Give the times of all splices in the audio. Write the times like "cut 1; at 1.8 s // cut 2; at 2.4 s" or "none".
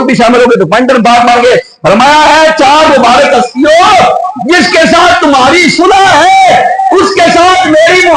none